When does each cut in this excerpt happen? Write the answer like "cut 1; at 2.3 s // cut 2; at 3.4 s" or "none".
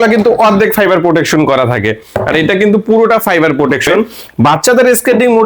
cut 1; at 4.2 s